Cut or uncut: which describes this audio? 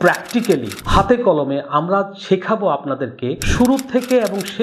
cut